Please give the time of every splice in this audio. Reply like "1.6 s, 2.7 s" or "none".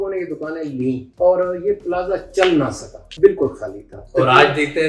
1.1 s, 3.0 s